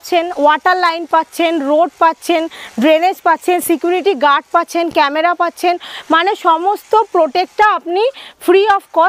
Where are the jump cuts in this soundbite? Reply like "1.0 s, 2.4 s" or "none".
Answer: none

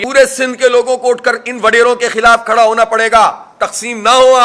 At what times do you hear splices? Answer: none

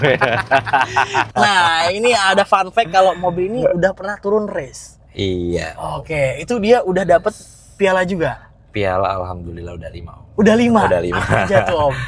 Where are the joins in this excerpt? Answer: 1.3 s

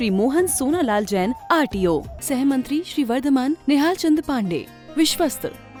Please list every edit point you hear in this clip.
none

